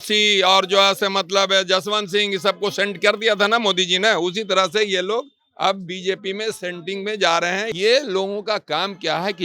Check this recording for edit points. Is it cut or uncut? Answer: cut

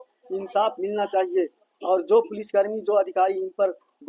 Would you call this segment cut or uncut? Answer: uncut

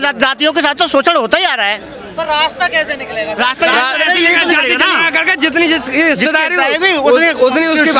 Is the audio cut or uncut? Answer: uncut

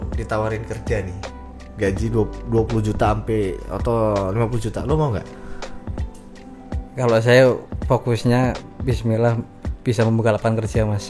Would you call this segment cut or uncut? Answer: uncut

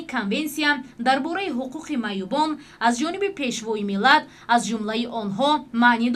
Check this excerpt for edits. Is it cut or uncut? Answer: uncut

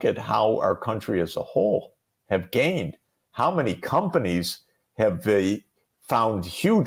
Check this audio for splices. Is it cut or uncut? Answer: uncut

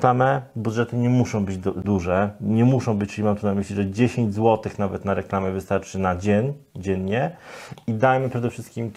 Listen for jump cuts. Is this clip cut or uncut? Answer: uncut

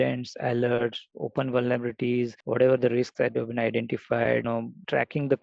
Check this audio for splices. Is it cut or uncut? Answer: uncut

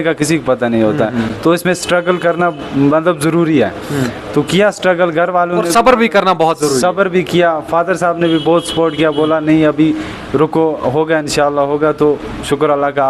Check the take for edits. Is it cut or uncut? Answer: uncut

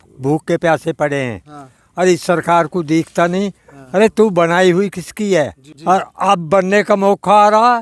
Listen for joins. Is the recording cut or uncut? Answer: cut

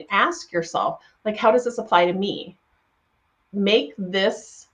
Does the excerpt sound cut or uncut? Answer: uncut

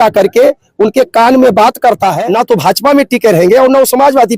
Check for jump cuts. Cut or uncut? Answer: cut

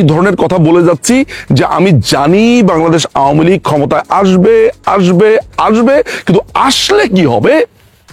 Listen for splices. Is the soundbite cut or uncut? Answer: uncut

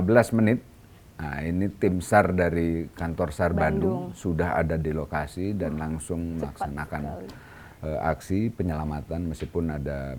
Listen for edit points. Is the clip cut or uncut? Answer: uncut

